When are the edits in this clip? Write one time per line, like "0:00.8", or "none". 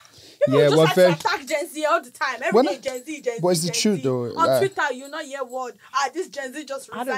none